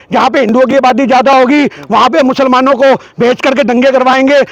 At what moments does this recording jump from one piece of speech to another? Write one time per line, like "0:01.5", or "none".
none